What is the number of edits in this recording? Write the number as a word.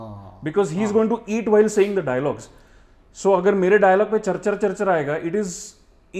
zero